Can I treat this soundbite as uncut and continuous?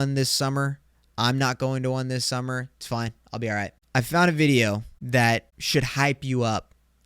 no; 3 cuts; at 3.7 s, 4.9 s, 5.5 s

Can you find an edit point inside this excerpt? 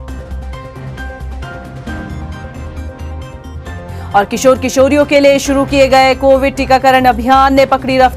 yes; 1 cut; at 1.0 s

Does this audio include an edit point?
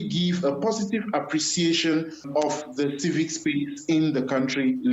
no; 0 cuts

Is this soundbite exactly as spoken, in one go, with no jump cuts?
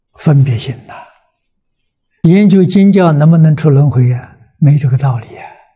no; 1 cut; at 2.2 s

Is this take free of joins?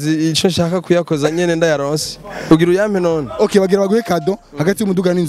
yes; 0 cuts

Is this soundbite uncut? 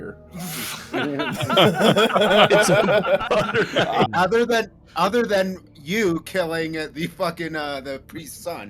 no; 1 cut; at 4.1 s

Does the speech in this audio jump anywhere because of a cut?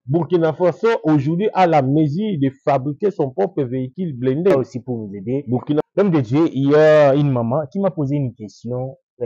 yes; 1 cut; at 4.5 s

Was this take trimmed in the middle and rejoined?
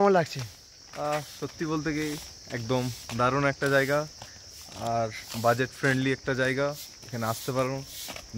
no; 0 cuts

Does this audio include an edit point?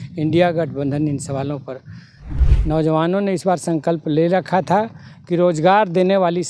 yes; 1 cut; at 2.2 s

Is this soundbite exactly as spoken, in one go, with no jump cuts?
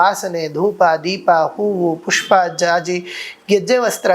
yes; 0 cuts

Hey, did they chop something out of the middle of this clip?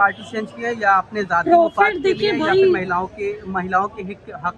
no; 0 cuts

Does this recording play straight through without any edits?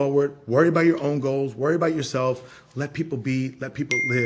yes; 0 cuts

